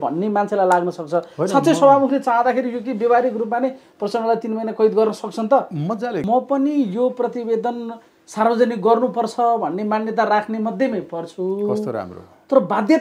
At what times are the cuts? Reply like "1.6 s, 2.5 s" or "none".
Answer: 6.2 s